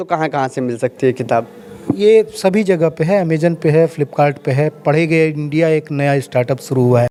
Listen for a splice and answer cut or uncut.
uncut